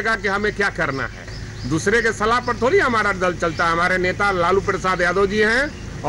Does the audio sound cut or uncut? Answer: uncut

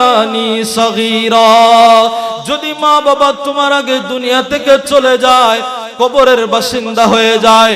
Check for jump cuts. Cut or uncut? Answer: uncut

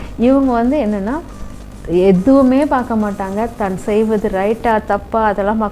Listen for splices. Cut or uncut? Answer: uncut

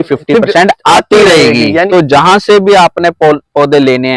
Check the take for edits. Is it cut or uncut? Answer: cut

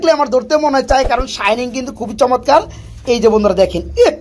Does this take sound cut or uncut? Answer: uncut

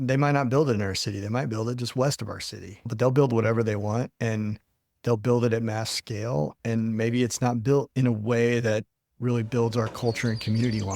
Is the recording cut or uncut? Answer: cut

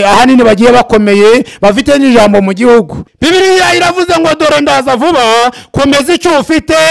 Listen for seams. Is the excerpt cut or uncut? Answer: cut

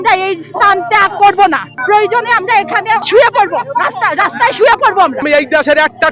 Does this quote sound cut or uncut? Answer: cut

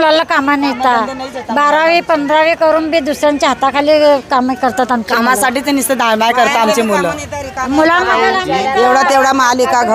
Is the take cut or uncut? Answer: uncut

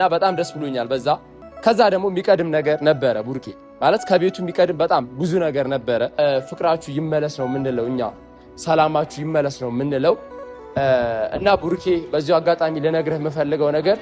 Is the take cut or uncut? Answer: cut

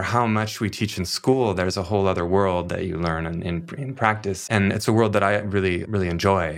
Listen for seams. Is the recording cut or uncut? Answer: uncut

